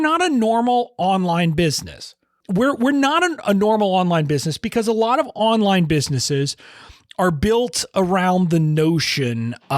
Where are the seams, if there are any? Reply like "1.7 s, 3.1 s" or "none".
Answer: 2.4 s